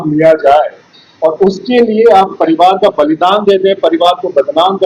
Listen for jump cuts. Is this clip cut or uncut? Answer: uncut